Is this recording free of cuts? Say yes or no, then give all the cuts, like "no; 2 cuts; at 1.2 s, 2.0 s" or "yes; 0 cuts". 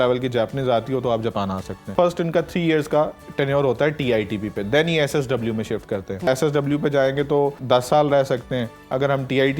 no; 3 cuts; at 1.9 s, 6.3 s, 7.6 s